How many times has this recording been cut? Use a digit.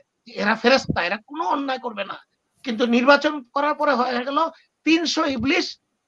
0